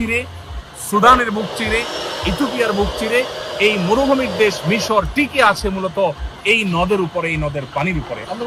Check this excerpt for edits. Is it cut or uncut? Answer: cut